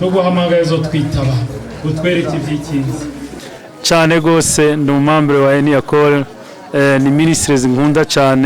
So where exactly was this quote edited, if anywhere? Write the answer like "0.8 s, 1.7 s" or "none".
3.2 s